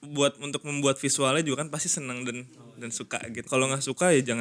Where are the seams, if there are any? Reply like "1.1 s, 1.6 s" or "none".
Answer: 3.5 s